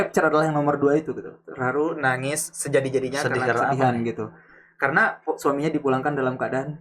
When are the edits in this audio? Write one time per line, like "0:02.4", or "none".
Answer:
none